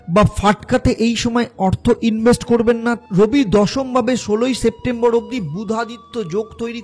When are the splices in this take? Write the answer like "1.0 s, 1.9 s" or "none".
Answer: 3.0 s